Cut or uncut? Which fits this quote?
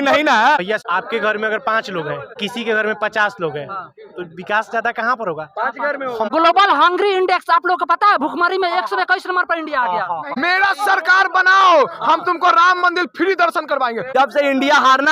cut